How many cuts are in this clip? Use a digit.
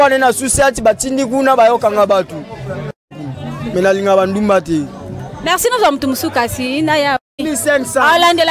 2